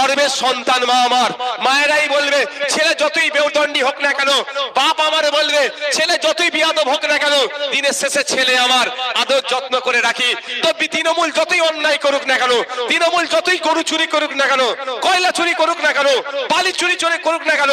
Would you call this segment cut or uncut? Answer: uncut